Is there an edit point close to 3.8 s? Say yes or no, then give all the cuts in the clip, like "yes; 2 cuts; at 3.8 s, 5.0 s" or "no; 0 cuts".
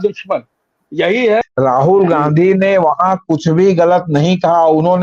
no; 1 cut; at 1.4 s